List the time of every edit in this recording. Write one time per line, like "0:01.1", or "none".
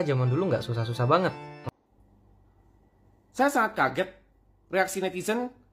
0:01.6